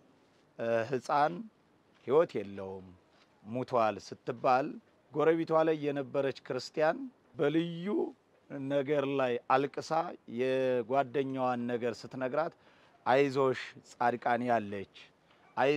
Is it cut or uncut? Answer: cut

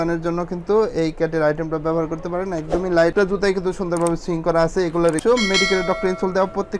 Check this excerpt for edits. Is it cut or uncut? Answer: cut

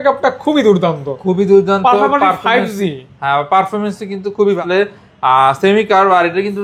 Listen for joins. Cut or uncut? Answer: cut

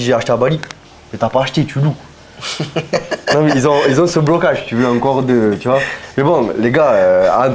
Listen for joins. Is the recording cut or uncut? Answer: uncut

